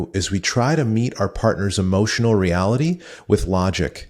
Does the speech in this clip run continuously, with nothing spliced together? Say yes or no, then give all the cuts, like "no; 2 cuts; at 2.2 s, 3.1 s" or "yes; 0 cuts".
yes; 0 cuts